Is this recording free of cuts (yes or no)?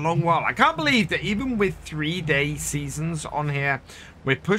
yes